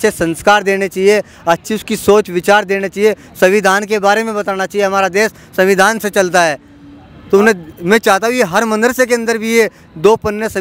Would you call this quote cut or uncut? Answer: uncut